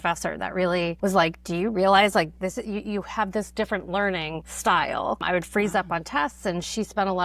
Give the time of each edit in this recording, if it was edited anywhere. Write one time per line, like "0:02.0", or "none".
0:00.9
0:04.4
0:05.2